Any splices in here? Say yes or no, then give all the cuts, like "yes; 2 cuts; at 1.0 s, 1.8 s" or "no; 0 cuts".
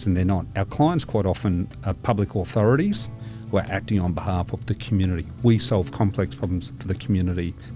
no; 0 cuts